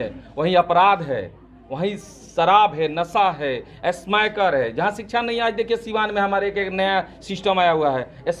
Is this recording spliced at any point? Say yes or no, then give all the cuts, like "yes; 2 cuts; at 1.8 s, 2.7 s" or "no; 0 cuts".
no; 0 cuts